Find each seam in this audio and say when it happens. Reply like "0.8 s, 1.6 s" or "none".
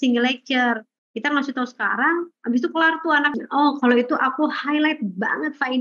3.4 s